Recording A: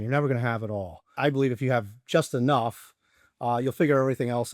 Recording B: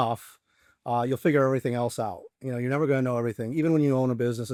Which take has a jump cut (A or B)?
A